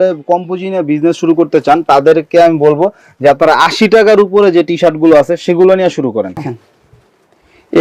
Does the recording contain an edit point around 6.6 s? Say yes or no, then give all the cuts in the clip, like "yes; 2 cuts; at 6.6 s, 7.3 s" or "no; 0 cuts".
yes; 1 cut; at 6.6 s